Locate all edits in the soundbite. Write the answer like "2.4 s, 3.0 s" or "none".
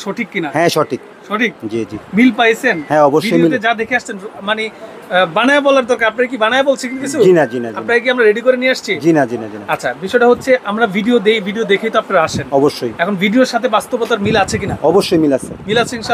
none